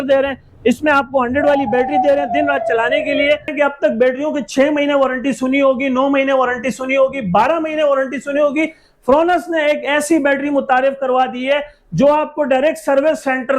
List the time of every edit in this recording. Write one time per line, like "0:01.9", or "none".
0:03.5